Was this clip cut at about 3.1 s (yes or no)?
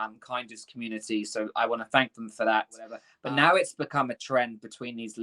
yes